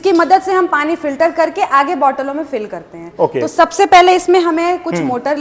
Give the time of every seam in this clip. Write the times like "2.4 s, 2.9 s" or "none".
none

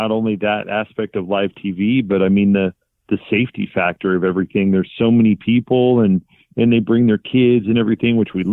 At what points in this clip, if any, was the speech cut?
none

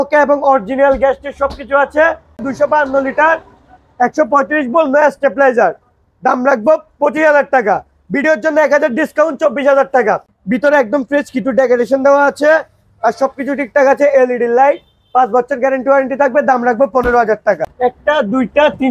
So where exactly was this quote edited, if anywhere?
2.4 s, 10.3 s, 17.7 s

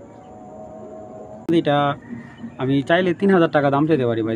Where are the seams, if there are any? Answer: 1.5 s

